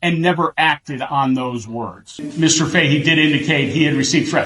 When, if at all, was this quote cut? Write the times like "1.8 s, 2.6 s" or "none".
2.2 s